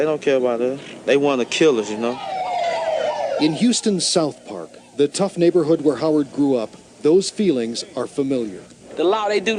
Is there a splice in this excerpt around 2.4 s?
yes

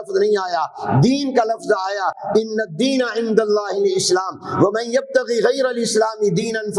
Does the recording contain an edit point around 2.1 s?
no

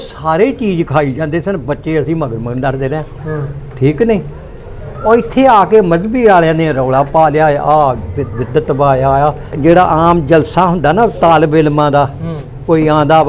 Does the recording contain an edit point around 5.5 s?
no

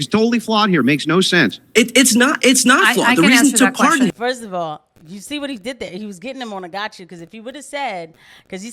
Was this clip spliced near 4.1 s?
yes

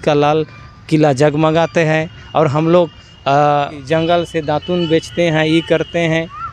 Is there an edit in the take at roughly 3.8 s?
yes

